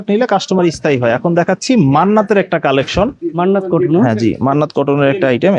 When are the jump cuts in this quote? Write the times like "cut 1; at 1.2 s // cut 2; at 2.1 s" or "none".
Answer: none

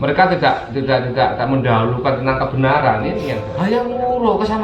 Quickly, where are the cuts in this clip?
cut 1; at 3.5 s

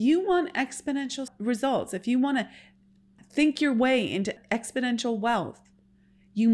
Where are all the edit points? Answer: cut 1; at 1.3 s // cut 2; at 3.2 s // cut 3; at 4.4 s

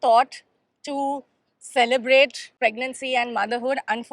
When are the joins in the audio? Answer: cut 1; at 2.6 s

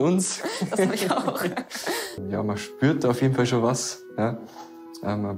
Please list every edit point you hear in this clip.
cut 1; at 2.1 s

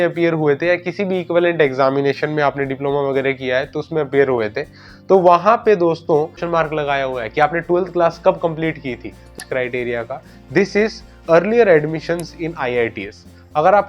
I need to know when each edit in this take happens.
cut 1; at 6.4 s // cut 2; at 9.4 s

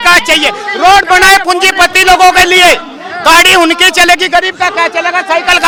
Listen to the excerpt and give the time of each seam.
none

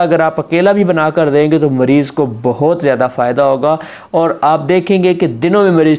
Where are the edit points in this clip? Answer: none

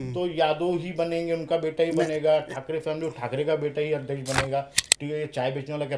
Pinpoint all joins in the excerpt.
cut 1; at 4.8 s

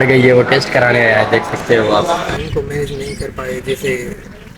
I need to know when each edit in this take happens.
cut 1; at 2.3 s

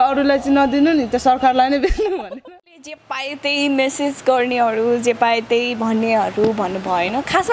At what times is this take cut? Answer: cut 1; at 2.8 s

